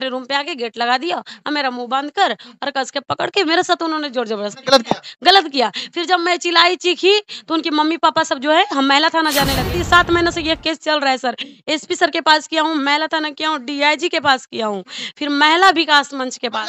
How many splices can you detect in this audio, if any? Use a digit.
1